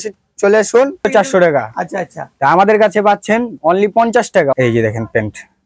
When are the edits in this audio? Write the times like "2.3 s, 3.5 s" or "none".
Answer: 1.1 s, 4.5 s